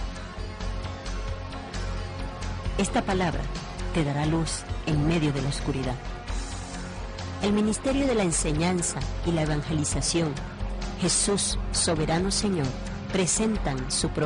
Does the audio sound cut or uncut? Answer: uncut